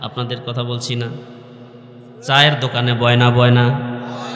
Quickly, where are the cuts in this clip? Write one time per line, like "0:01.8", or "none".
none